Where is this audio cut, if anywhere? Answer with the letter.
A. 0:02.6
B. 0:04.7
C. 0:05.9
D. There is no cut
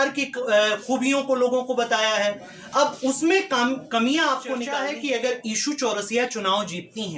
B